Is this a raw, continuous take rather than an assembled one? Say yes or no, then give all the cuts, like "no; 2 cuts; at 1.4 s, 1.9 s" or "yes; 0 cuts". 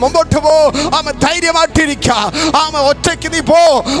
yes; 0 cuts